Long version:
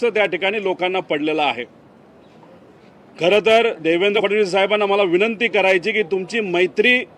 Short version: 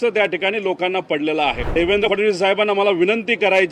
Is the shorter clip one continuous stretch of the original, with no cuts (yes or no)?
no